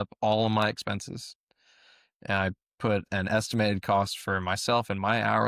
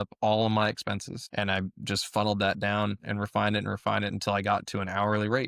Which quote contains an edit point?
second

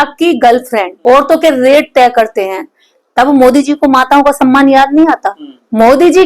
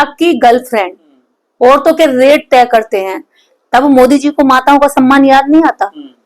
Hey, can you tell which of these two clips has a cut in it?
first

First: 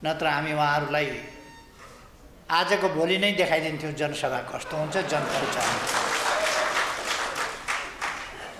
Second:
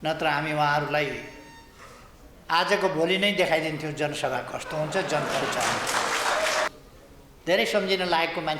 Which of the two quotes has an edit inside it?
second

